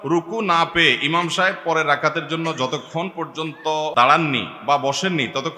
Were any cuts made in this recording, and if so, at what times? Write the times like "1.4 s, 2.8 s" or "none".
3.9 s